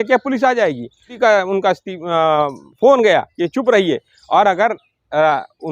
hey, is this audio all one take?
no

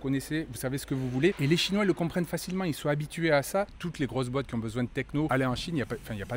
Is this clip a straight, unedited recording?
no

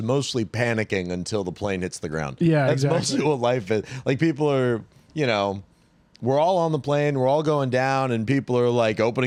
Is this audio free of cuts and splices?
yes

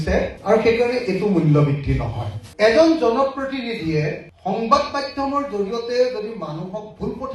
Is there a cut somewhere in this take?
yes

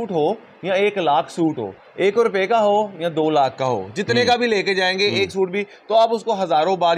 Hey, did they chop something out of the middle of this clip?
no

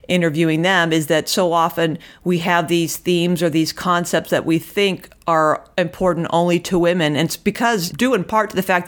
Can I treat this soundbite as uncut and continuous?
no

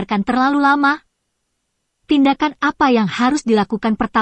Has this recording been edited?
yes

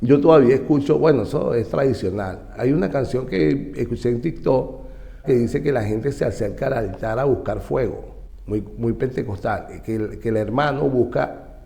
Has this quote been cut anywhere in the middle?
yes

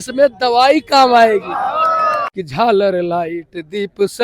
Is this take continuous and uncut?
no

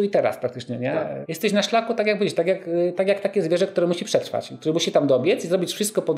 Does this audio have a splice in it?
yes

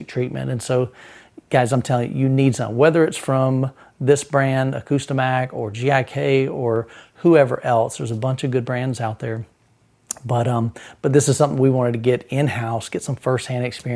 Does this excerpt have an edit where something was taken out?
no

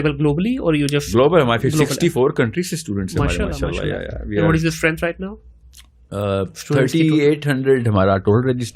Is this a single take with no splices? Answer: yes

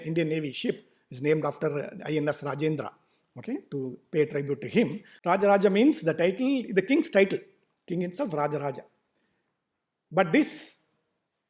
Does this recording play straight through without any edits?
no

